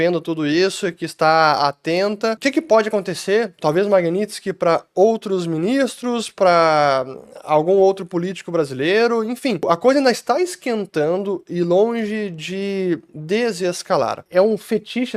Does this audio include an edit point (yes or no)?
yes